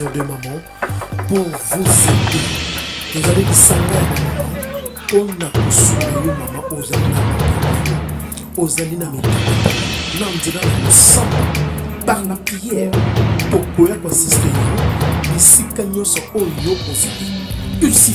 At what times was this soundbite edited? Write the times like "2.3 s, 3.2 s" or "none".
11.3 s